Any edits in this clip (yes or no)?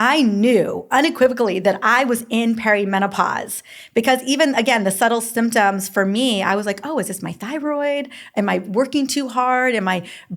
no